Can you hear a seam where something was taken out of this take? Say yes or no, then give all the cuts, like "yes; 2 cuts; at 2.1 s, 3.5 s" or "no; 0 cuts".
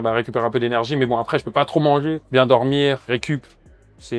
yes; 2 cuts; at 2.2 s, 3.0 s